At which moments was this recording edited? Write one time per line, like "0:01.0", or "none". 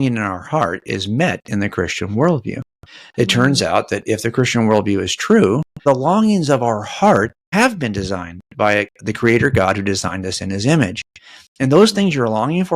0:05.8
0:07.4